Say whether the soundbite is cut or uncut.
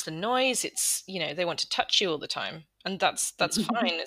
uncut